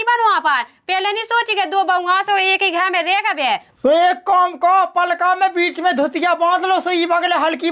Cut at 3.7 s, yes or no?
yes